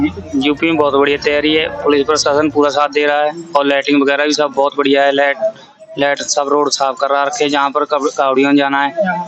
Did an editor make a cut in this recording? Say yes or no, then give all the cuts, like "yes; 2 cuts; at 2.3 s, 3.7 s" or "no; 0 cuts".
no; 0 cuts